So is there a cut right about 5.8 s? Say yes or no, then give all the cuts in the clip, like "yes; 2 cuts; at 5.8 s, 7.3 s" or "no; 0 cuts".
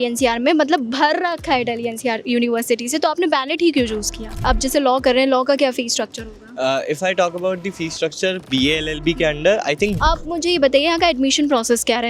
no; 2 cuts; at 4.4 s, 10.0 s